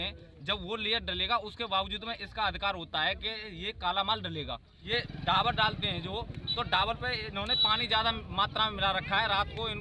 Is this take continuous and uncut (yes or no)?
no